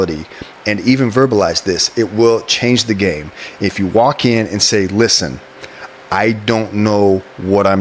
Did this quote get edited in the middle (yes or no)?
no